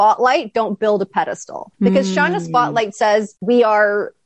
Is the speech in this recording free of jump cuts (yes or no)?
yes